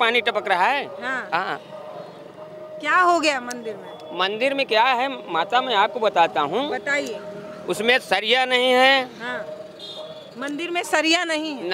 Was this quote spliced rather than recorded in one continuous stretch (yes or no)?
no